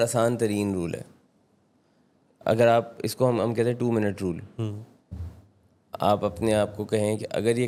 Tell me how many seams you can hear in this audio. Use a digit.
0